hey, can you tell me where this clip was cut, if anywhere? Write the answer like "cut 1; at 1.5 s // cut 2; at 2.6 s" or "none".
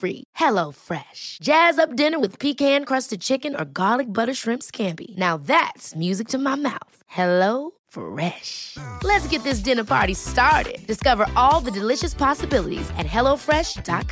none